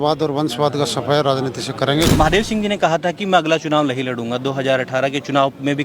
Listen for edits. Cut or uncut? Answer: cut